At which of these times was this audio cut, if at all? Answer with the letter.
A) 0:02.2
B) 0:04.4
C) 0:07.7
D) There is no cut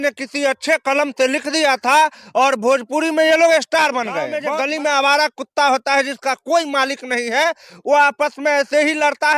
B